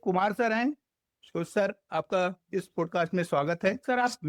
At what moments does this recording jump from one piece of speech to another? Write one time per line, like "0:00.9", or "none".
none